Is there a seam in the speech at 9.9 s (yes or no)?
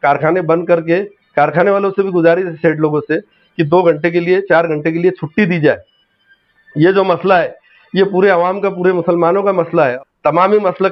yes